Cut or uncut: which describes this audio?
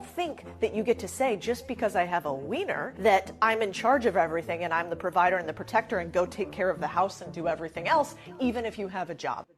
uncut